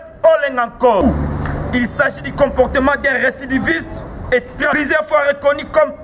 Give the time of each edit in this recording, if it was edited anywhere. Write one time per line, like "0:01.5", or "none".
0:01.0
0:04.7